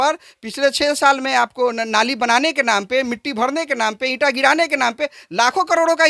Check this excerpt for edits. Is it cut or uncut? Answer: uncut